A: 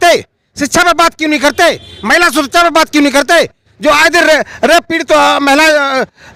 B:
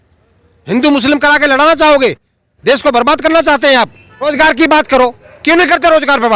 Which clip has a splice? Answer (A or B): B